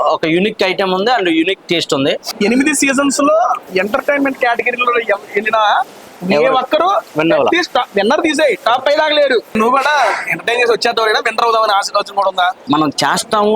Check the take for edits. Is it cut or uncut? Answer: cut